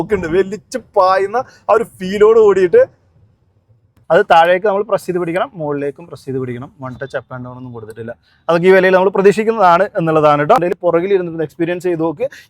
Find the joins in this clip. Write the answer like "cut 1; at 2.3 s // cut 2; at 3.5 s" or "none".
cut 1; at 4.0 s // cut 2; at 10.8 s